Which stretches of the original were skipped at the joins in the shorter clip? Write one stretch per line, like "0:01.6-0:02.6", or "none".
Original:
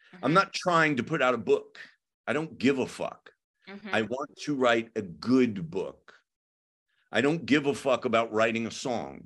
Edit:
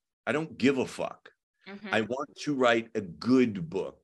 none